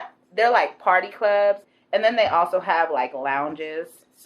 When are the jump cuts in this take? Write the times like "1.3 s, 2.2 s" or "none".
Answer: 1.6 s